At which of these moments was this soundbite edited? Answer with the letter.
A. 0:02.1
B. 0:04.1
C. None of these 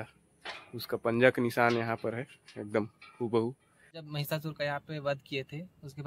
B